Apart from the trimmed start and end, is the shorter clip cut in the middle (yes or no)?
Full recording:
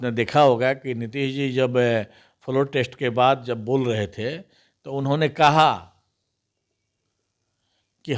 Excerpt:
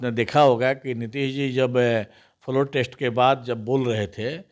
no